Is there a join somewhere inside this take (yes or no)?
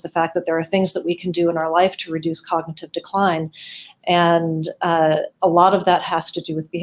no